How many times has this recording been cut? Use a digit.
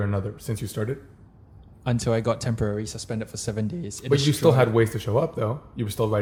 0